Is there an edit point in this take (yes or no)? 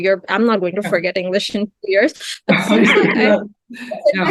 no